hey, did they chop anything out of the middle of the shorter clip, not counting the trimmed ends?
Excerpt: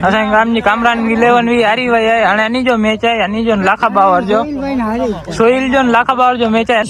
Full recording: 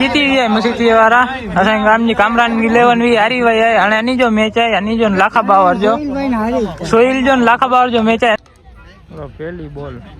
no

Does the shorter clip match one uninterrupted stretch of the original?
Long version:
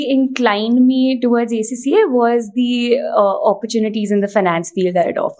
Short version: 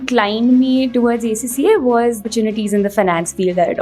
no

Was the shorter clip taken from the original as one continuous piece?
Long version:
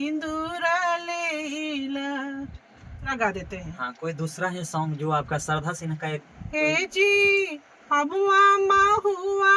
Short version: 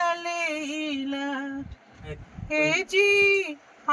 no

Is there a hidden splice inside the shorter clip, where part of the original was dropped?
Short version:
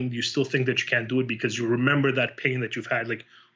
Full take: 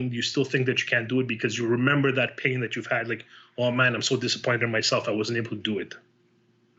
no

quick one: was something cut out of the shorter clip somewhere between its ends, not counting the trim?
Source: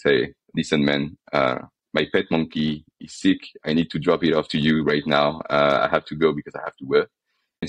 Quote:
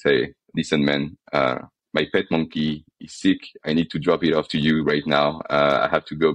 no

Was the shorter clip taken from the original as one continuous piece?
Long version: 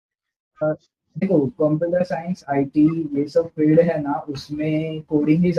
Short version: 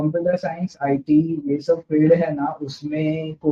yes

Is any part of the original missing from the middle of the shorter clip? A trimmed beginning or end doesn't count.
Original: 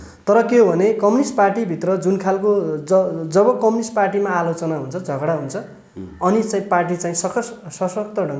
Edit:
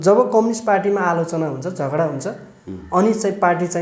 no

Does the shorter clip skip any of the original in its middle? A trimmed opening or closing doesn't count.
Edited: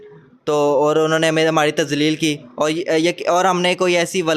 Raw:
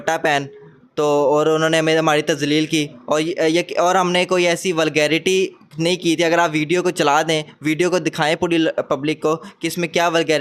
no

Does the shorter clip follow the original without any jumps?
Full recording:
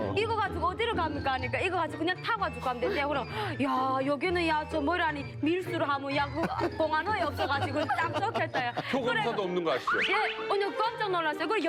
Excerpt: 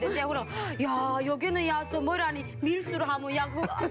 yes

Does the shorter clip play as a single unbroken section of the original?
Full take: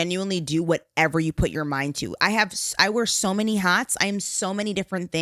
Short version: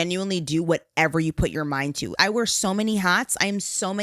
no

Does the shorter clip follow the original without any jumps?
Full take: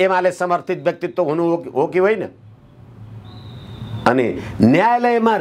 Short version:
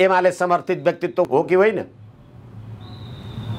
no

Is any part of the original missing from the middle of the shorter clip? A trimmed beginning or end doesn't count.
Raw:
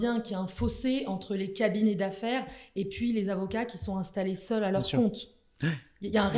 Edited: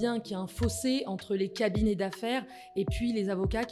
no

